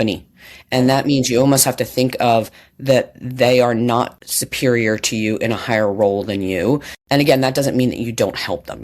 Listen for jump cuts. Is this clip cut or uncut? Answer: cut